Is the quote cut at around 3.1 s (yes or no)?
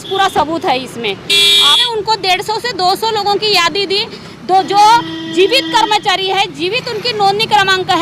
no